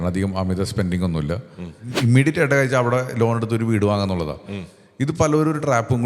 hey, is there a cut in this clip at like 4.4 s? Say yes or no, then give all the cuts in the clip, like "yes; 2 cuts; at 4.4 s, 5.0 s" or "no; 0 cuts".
no; 1 cut; at 1.9 s